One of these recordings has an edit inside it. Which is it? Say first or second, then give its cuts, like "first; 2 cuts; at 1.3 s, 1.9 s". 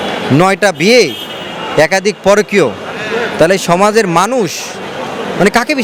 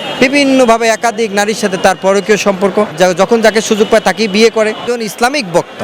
second; 2 cuts; at 2.9 s, 4.8 s